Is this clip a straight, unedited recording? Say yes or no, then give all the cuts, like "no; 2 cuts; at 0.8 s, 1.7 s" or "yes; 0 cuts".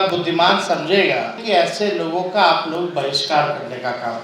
no; 1 cut; at 1.4 s